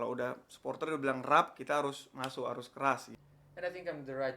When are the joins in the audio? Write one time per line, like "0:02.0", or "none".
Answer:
0:03.1